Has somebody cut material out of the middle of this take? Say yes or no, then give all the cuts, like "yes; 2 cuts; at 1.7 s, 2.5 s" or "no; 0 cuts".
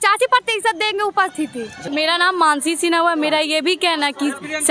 yes; 1 cut; at 1.8 s